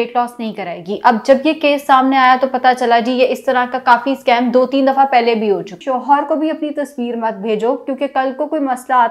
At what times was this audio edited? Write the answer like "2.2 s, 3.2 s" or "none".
5.7 s